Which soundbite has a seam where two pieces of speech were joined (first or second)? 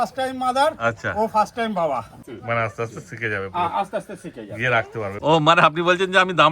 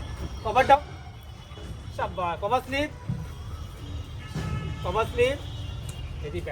first